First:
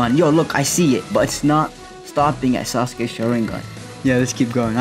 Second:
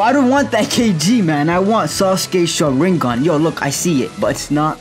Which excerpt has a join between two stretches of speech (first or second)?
first